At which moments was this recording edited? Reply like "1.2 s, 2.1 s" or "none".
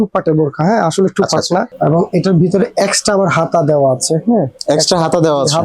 1.7 s

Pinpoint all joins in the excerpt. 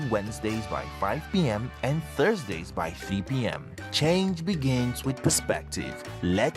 none

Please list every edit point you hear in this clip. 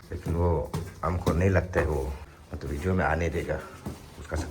2.2 s

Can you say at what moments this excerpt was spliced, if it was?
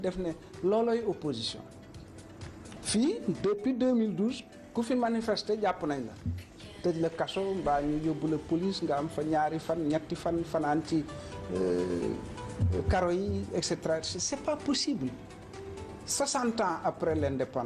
none

